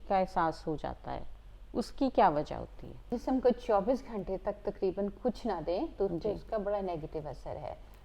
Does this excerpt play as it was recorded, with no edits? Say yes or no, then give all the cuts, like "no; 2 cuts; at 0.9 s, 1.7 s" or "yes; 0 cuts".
no; 1 cut; at 3.2 s